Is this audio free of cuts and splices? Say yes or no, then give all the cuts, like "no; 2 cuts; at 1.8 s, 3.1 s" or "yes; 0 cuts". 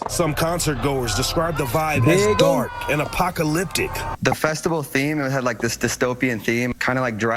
yes; 0 cuts